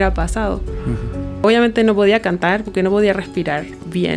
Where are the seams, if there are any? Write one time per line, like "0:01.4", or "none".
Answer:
0:01.4